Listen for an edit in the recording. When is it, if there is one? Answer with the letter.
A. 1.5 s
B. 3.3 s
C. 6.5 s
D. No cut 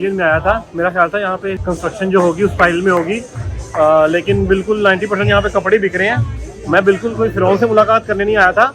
A